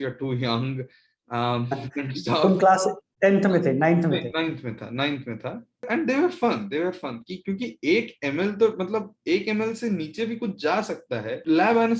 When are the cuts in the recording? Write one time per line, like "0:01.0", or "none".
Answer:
0:05.9